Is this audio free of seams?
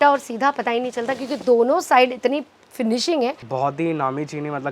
no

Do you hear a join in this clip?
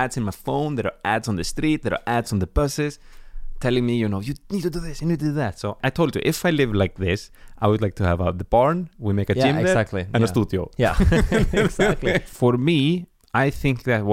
yes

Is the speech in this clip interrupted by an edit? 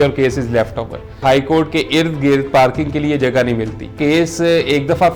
yes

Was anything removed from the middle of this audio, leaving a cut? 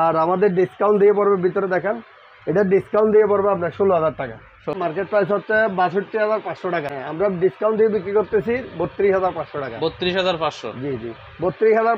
yes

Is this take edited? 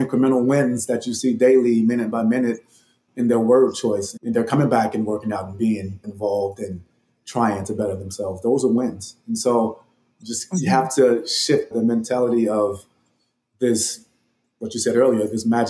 yes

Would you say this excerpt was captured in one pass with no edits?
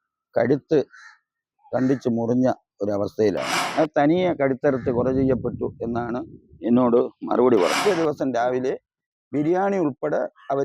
no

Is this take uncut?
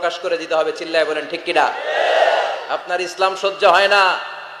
yes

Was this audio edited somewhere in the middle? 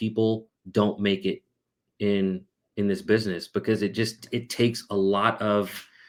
no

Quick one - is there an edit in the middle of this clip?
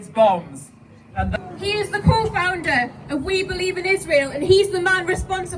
yes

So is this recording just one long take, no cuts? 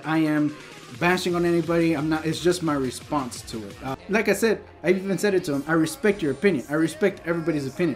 no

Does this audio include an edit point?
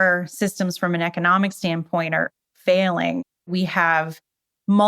yes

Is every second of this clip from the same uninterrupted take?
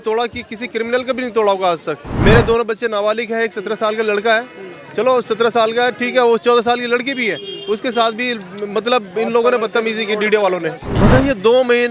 no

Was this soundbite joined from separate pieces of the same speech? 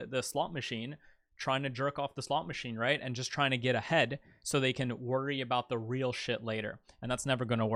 no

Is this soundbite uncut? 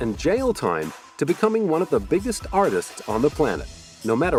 yes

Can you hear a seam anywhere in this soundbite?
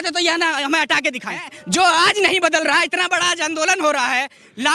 yes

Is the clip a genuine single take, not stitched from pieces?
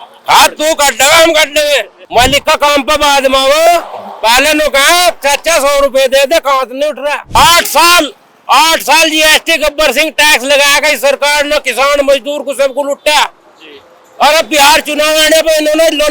no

